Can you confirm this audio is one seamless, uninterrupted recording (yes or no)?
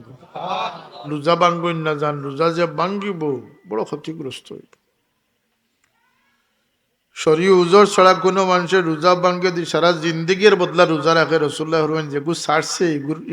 no